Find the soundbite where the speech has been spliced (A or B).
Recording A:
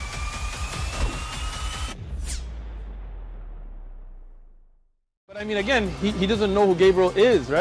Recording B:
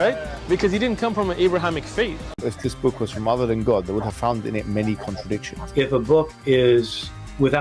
B